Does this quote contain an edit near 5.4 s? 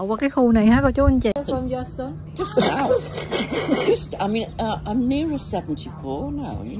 no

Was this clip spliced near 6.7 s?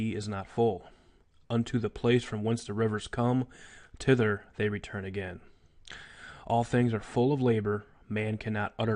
yes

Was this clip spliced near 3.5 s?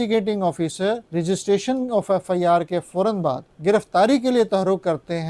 yes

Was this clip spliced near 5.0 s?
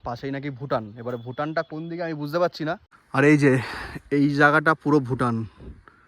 no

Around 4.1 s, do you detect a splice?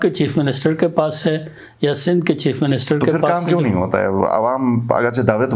no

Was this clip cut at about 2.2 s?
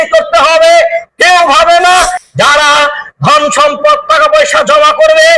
yes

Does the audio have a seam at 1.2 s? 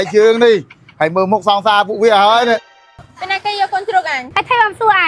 no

